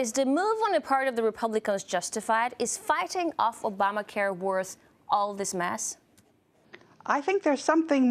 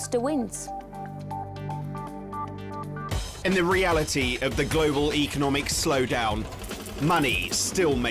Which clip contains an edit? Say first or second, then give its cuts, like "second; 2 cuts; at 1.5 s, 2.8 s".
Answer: second; 1 cut; at 6.0 s